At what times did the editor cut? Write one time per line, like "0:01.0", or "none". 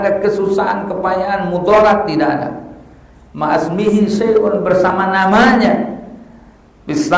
none